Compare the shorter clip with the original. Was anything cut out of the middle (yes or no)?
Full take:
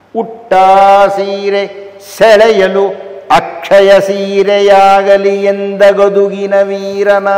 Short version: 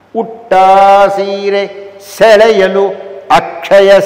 no